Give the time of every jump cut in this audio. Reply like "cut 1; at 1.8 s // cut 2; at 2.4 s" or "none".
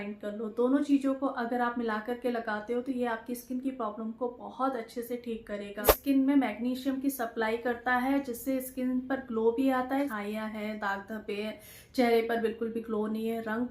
cut 1; at 5.9 s // cut 2; at 10.1 s